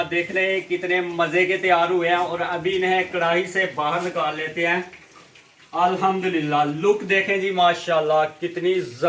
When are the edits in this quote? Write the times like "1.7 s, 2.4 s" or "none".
none